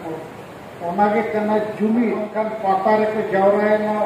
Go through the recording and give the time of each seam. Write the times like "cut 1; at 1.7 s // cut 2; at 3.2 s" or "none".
cut 1; at 2.3 s